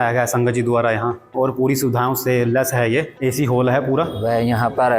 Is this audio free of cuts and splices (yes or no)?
no